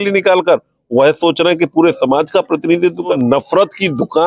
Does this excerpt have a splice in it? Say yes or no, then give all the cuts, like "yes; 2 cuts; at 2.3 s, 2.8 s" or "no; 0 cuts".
yes; 1 cut; at 3.2 s